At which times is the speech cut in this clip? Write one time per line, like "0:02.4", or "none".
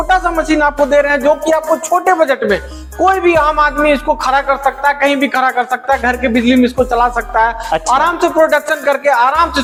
none